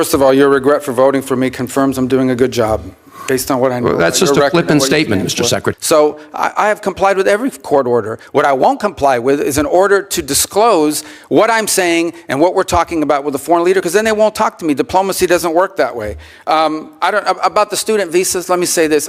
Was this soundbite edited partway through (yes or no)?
yes